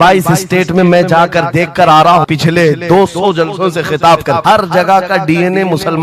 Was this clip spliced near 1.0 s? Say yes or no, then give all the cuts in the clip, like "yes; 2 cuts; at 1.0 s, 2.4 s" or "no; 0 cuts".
no; 2 cuts; at 2.3 s, 4.4 s